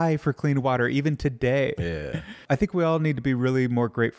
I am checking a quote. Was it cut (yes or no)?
yes